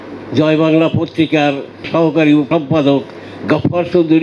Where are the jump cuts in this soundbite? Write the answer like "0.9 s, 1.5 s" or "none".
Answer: 1.9 s, 2.5 s